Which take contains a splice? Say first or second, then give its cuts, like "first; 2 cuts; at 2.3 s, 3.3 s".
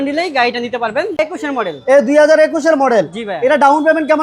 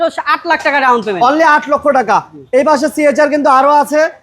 first; 1 cut; at 1.2 s